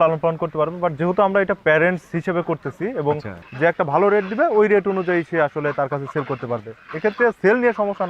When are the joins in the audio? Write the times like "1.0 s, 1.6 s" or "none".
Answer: 3.4 s